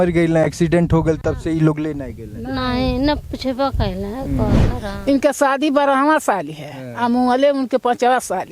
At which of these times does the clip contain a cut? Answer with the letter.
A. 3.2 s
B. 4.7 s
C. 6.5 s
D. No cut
B